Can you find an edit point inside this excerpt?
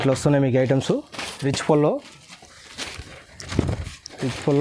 no; 0 cuts

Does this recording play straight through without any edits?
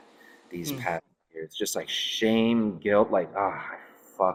yes; 0 cuts

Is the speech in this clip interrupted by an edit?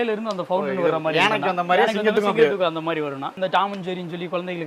yes; 1 cut; at 3.4 s

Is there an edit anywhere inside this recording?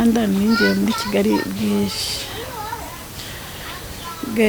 no; 0 cuts

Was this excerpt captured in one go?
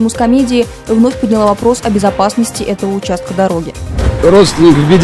no; 1 cut; at 4.1 s

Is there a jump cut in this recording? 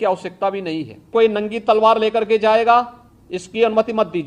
yes; 1 cut; at 1.1 s

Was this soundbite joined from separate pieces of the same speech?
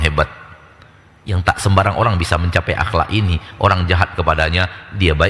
no; 0 cuts

